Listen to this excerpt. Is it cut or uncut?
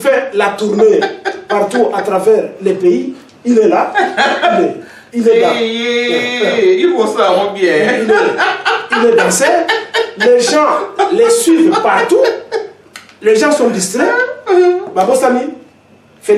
uncut